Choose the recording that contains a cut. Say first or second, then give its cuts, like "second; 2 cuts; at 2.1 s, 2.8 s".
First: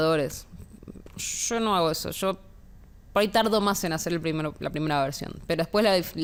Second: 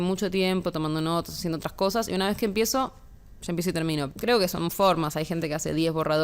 second; 1 cut; at 4.1 s